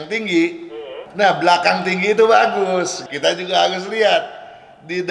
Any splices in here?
yes; 2 cuts; at 1.0 s, 3.0 s

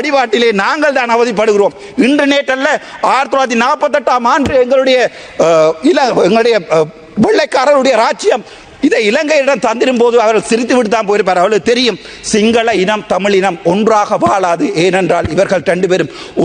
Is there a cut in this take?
no; 0 cuts

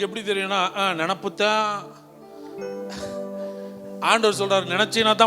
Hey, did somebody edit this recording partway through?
no; 0 cuts

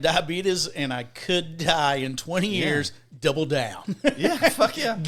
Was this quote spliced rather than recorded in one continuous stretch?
no; 0 cuts

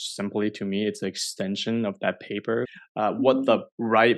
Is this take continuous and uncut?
no; 1 cut; at 2.7 s

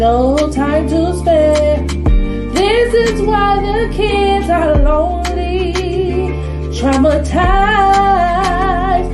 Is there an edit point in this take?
no; 0 cuts

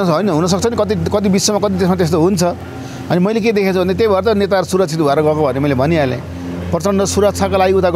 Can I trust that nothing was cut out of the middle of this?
yes; 0 cuts

